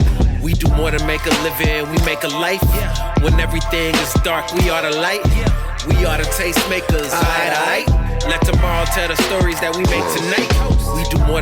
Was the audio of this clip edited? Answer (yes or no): no